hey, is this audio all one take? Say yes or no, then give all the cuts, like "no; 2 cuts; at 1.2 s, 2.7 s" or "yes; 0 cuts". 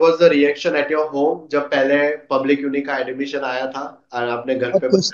yes; 0 cuts